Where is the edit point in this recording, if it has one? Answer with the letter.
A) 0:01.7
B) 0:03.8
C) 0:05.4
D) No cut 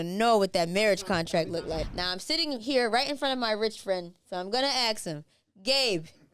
A